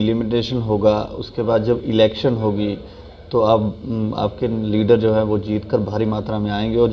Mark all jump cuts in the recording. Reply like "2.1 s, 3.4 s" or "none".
none